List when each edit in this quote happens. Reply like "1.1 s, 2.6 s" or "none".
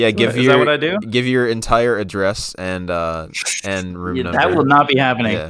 none